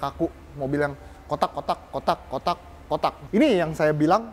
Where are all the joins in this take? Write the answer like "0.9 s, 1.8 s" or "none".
3.2 s